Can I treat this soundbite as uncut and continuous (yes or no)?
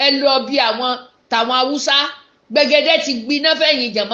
yes